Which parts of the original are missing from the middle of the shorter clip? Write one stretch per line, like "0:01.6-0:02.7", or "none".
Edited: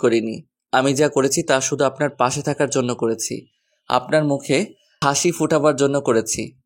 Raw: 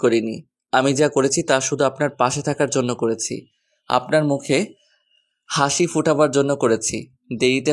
0:04.8-0:05.4